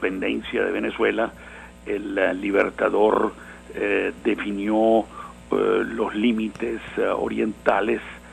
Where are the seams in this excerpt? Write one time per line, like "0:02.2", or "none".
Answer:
none